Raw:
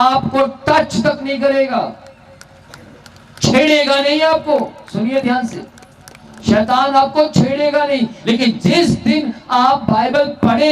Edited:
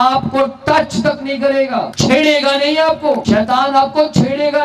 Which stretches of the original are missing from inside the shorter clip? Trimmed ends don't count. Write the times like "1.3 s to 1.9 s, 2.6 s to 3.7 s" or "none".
1.9 s to 3.4 s, 4.7 s to 6.4 s